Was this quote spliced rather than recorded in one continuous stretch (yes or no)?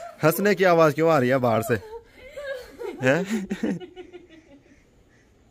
no